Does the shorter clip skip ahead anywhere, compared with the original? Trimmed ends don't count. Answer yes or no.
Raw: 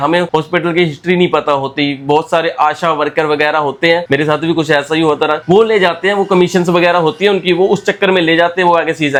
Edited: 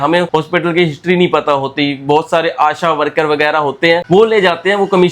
yes